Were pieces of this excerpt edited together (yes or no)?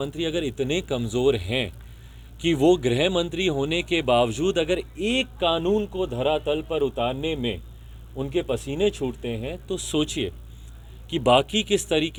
no